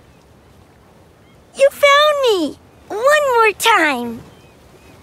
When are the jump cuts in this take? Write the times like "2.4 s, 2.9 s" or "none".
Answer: 1.5 s, 4.2 s